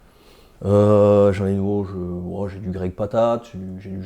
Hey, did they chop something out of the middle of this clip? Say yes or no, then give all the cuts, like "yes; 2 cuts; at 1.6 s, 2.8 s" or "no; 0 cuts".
no; 0 cuts